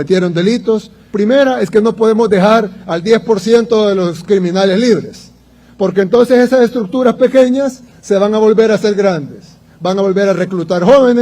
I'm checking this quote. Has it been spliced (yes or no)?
yes